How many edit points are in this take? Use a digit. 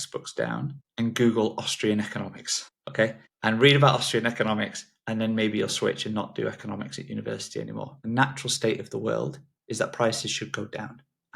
1